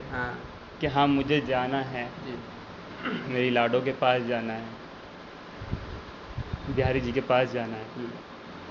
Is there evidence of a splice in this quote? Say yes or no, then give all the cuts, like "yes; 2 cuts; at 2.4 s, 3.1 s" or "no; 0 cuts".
no; 0 cuts